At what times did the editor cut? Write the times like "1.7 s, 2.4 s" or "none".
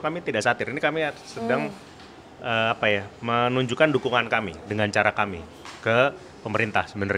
none